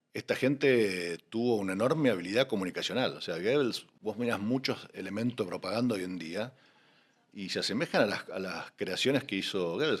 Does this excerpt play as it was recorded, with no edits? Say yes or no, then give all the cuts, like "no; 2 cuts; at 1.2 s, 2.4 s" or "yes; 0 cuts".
yes; 0 cuts